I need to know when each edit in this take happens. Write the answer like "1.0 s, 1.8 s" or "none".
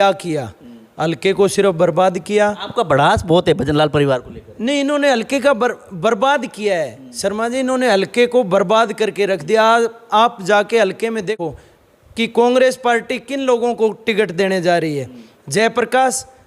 11.4 s